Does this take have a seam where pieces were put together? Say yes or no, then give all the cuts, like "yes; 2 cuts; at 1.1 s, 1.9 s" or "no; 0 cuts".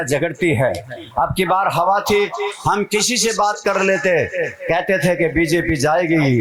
no; 0 cuts